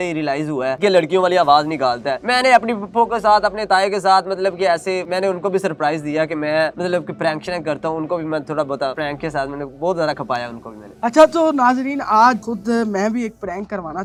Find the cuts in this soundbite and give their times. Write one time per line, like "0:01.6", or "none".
none